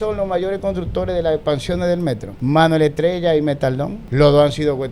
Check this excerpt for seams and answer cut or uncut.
cut